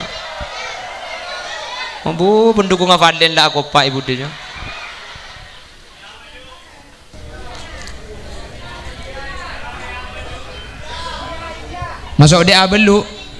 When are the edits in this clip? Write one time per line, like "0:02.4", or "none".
none